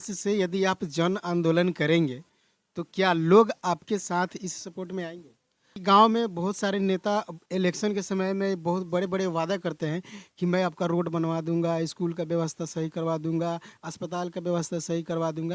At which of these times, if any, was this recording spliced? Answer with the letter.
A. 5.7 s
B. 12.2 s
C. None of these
A